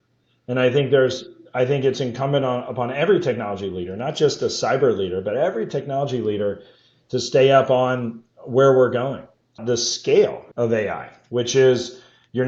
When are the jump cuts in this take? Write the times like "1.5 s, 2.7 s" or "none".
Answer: 9.6 s, 10.4 s